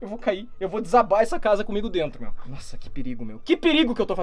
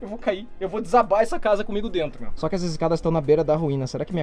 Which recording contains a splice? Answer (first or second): second